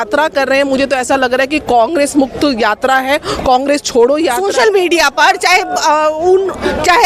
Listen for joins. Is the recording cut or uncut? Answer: cut